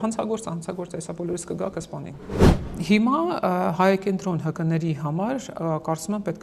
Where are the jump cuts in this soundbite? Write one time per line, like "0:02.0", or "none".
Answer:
0:02.6